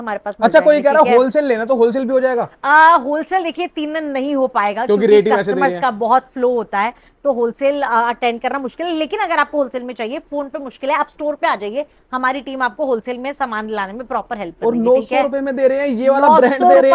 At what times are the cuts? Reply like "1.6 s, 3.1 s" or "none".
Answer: none